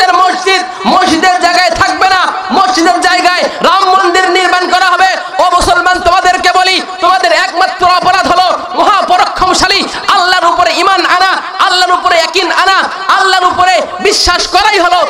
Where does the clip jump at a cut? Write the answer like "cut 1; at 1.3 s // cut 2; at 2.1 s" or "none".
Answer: none

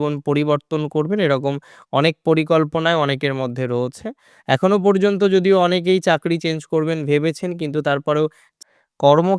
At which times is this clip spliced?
cut 1; at 8.5 s

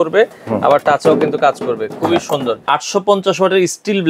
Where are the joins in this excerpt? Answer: cut 1; at 2.6 s

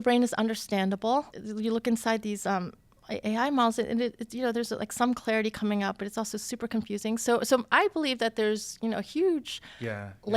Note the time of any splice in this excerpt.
cut 1; at 1.4 s

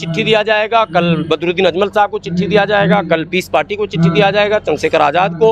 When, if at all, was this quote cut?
none

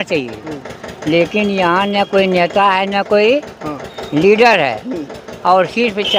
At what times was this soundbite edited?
none

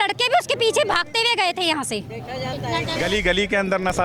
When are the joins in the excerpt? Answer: cut 1; at 2.9 s

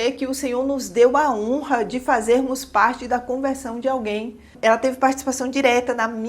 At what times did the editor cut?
cut 1; at 4.5 s

